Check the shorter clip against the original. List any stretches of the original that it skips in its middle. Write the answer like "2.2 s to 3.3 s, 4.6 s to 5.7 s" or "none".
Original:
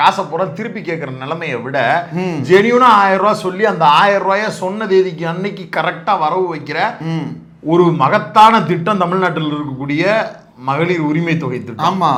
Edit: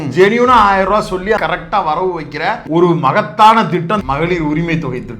3.7 s to 5.7 s, 7.0 s to 7.6 s, 9.0 s to 10.6 s